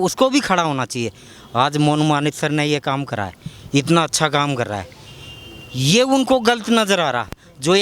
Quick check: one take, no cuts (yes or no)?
yes